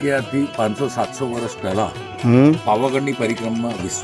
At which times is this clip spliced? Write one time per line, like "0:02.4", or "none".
0:02.6

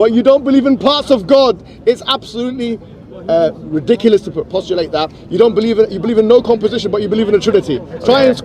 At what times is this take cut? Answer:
none

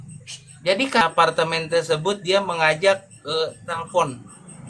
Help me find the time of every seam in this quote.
0:01.0

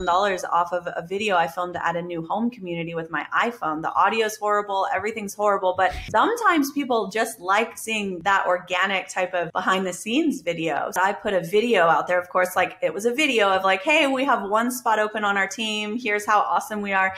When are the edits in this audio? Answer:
0:06.0
0:08.2
0:09.5
0:11.0

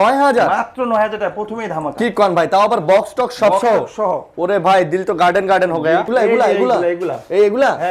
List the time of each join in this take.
0:06.1

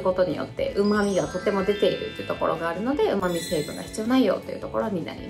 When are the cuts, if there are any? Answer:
none

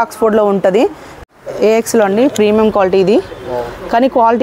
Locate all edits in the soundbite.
0:01.1

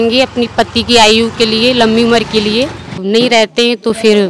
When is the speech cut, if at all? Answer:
0:03.0

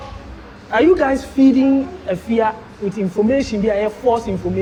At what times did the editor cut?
none

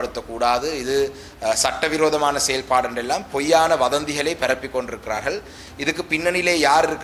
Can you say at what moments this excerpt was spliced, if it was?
none

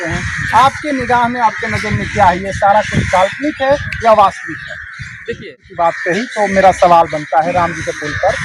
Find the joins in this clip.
0:05.3

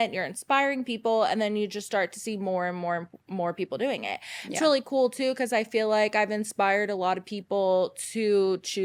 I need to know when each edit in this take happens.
none

